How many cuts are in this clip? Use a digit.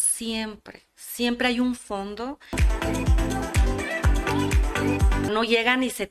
2